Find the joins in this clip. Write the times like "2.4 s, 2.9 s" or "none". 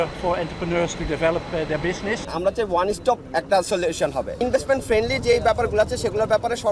2.3 s, 4.4 s